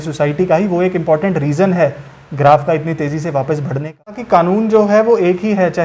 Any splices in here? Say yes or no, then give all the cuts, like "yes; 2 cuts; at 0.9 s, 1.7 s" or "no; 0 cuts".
yes; 1 cut; at 4.2 s